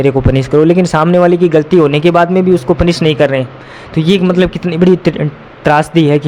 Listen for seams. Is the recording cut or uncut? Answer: uncut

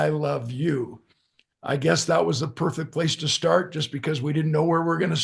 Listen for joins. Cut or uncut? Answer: uncut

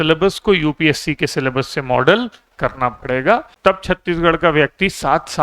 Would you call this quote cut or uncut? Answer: cut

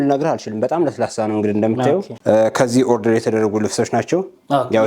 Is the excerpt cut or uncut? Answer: cut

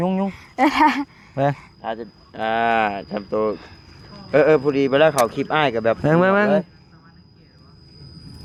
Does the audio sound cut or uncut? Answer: uncut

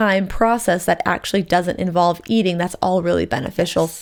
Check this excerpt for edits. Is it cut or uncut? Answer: uncut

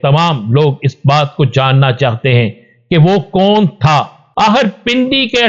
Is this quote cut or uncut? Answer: cut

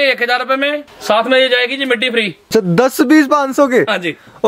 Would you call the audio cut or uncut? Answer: cut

